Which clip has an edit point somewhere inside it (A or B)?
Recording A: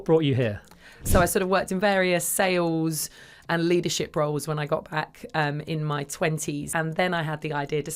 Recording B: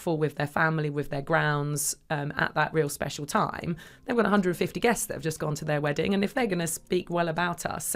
A